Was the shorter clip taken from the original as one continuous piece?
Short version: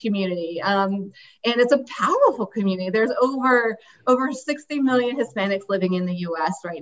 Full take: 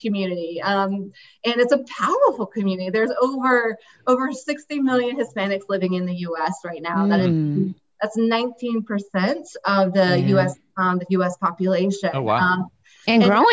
yes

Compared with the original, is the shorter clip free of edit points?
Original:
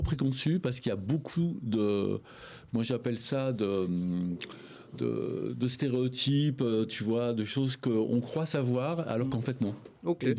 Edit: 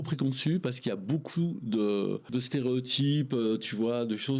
no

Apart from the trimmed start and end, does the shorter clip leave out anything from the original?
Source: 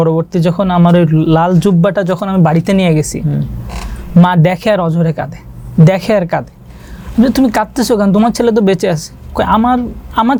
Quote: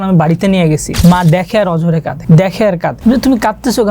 yes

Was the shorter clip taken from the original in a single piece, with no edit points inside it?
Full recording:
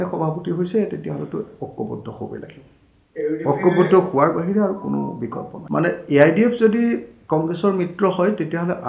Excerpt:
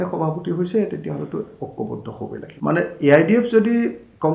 no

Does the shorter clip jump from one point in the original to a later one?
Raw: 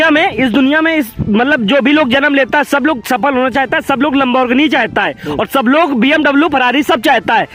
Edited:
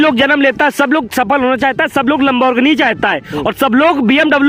no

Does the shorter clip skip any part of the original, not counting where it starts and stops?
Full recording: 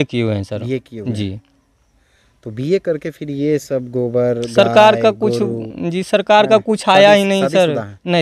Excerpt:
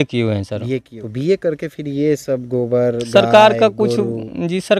yes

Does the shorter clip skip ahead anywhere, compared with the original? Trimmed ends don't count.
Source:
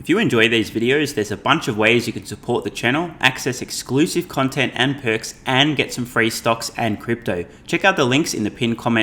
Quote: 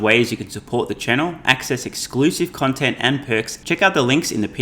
yes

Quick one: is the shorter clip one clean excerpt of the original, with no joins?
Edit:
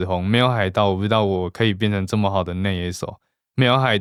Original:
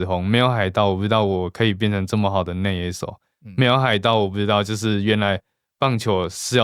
yes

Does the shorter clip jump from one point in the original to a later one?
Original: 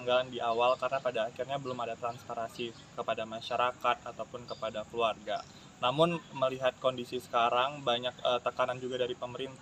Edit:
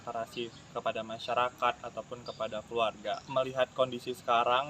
yes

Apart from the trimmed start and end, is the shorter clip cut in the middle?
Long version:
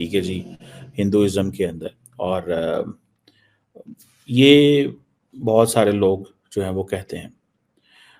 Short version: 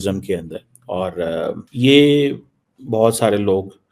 yes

